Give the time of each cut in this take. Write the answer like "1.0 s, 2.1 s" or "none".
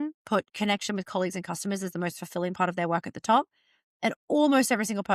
none